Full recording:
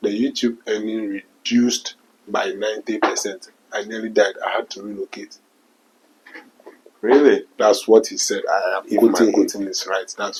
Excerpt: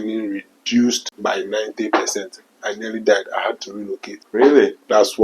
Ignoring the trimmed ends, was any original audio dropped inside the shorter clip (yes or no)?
yes